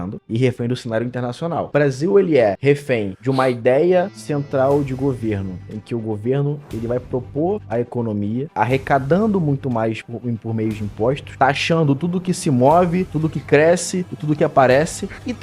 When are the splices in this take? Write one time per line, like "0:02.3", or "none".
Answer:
0:01.7